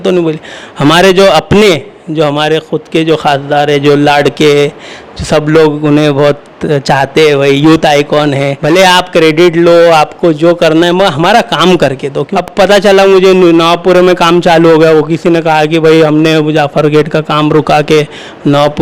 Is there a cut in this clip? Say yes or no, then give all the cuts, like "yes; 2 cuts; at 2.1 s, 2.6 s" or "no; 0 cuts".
yes; 2 cuts; at 8.5 s, 12.2 s